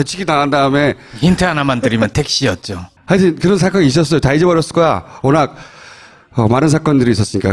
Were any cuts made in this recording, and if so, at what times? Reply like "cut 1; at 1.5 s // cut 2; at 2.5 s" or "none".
cut 1; at 5.1 s